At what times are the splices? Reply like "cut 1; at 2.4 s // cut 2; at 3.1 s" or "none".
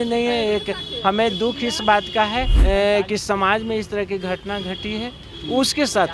cut 1; at 2.5 s